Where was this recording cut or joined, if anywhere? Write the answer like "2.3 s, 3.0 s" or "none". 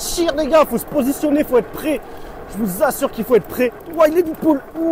3.8 s